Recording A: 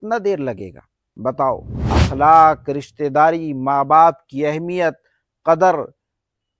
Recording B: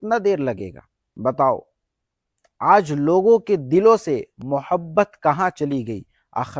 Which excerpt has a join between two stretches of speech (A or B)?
A